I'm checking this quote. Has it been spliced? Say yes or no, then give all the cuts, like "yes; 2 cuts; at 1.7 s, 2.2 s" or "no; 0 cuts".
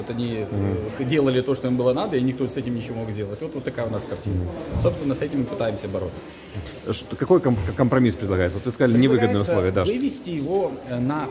no; 0 cuts